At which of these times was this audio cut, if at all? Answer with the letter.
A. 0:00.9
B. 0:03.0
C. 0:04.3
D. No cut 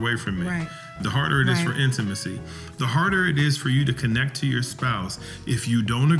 A